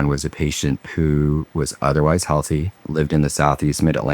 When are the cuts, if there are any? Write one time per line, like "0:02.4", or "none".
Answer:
0:02.8

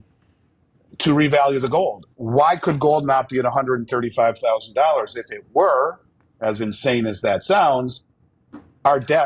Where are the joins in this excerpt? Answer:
0:02.1

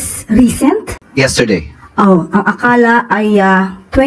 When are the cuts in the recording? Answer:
none

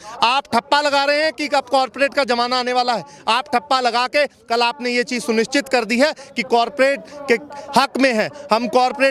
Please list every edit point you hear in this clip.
none

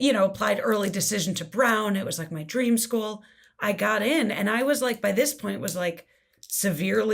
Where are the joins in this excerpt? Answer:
none

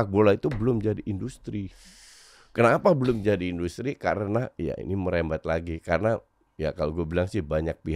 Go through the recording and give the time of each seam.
none

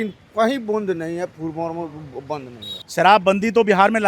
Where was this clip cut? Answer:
0:02.8

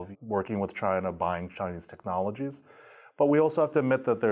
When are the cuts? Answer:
none

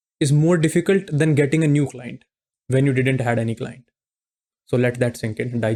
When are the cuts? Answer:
none

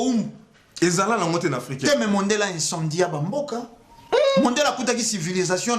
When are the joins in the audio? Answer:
none

